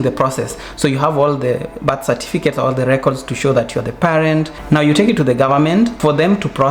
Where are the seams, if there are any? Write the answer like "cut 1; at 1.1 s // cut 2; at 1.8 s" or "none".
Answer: none